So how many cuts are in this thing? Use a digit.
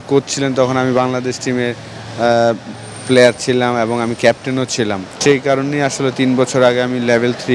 1